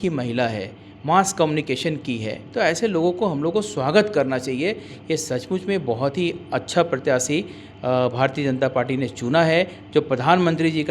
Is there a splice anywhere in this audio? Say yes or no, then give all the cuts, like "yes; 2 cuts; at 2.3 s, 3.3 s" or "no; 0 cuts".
no; 0 cuts